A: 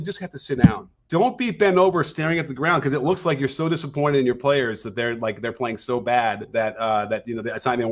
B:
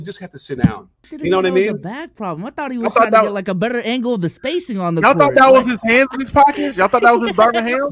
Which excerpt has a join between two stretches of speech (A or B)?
B